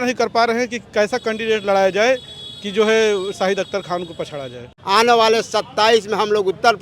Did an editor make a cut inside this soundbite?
yes; 1 cut; at 4.8 s

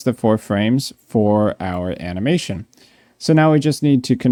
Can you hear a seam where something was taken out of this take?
no; 0 cuts

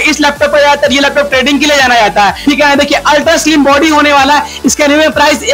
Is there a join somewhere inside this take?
no; 0 cuts

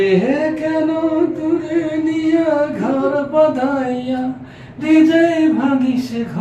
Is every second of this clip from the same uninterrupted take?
yes; 0 cuts

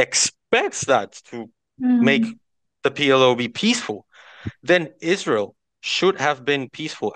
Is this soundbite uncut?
yes; 0 cuts

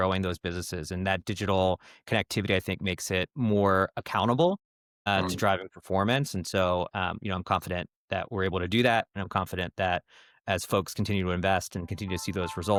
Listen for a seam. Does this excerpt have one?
no; 0 cuts

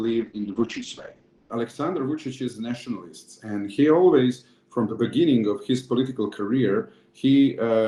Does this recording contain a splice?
no; 0 cuts

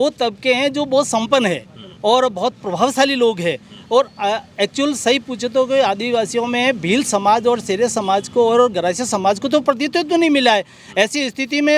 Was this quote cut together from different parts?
no; 0 cuts

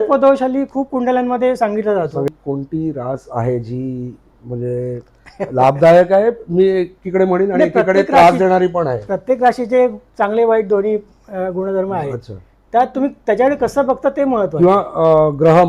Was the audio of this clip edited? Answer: yes; 1 cut; at 2.3 s

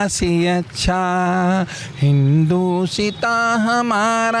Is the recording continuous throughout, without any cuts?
yes; 0 cuts

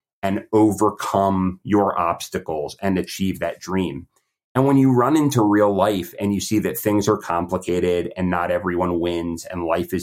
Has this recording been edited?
no; 0 cuts

